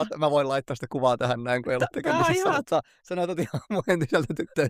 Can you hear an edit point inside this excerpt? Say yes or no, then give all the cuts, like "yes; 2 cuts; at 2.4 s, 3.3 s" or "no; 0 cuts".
no; 0 cuts